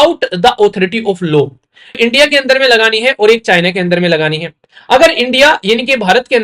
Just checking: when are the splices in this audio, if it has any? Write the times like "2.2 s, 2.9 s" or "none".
2.0 s